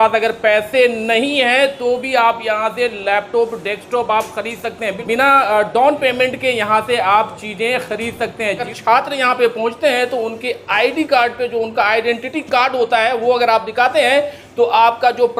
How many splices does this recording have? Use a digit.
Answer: 2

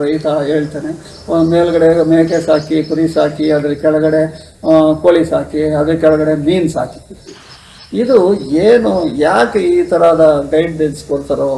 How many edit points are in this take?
0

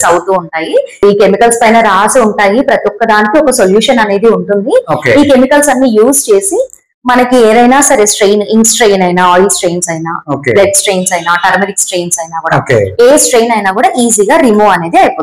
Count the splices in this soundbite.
1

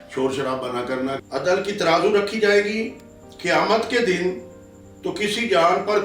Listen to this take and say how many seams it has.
1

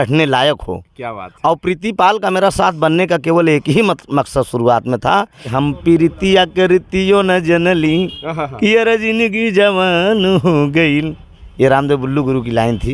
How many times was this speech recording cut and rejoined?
1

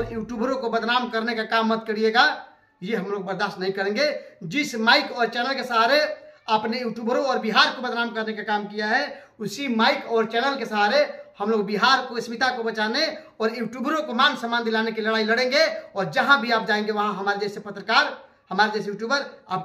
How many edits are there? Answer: 0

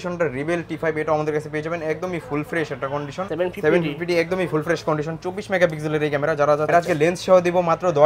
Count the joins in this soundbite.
2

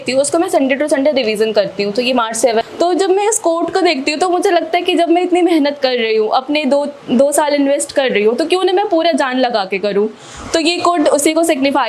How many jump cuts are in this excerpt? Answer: 1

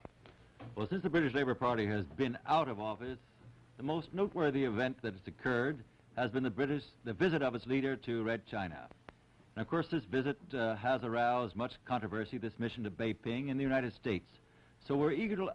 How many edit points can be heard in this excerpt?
1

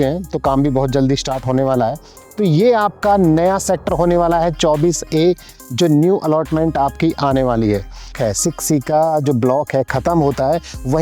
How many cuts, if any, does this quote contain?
1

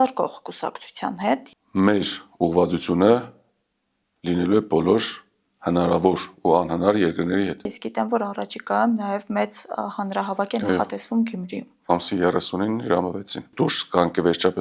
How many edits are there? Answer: 3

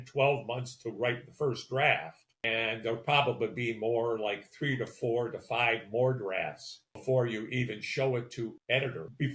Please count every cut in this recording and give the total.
2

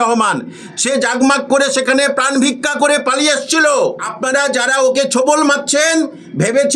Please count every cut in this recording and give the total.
1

